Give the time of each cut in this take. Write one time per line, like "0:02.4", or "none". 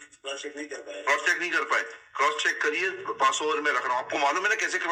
none